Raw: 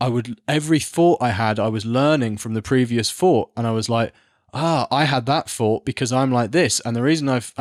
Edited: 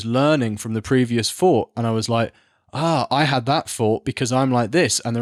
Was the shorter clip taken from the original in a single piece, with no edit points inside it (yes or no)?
yes